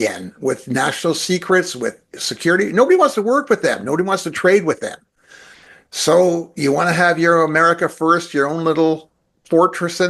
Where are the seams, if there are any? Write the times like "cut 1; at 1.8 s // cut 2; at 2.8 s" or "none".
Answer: none

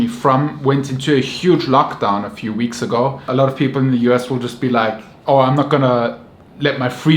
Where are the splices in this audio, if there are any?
cut 1; at 3.2 s

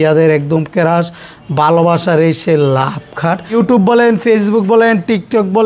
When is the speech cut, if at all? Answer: cut 1; at 3.5 s

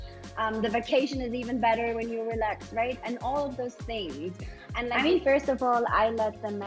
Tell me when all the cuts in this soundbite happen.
cut 1; at 4.9 s

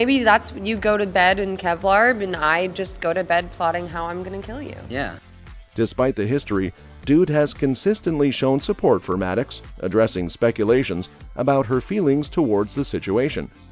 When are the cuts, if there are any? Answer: none

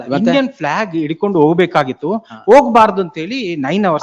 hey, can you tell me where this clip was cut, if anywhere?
none

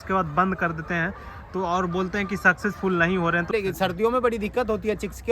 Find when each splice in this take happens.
cut 1; at 3.5 s

